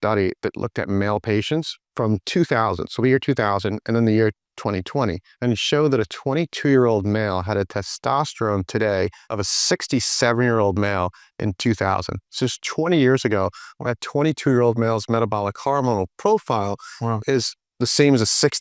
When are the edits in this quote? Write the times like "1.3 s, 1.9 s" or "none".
1.8 s, 5.3 s, 9.2 s